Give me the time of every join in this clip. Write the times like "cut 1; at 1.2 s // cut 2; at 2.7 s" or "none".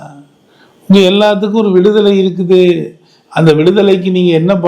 none